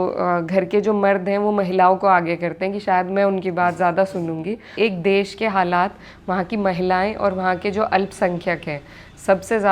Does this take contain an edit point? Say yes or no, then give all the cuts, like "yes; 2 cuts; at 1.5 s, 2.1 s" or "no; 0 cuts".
yes; 1 cut; at 4.7 s